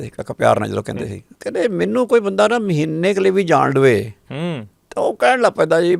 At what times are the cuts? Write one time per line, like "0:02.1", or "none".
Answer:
0:01.2